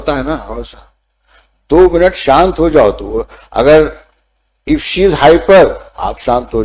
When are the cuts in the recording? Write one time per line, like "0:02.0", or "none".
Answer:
none

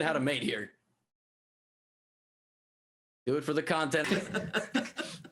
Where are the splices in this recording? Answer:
0:04.1

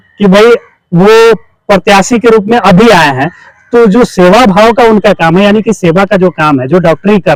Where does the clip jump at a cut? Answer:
none

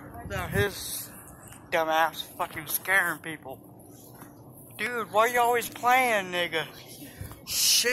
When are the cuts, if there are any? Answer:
none

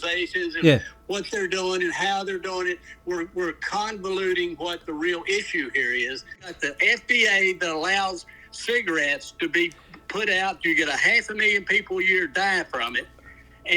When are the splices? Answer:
0:06.5

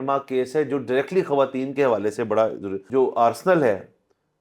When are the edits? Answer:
0:02.8

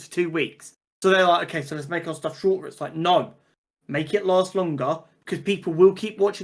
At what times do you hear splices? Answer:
none

